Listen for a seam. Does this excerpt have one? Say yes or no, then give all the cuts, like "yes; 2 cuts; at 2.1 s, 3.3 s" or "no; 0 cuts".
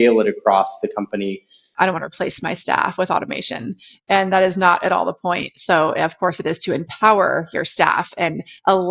yes; 1 cut; at 1.6 s